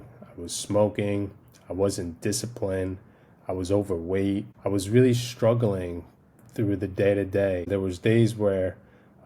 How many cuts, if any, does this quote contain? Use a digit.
2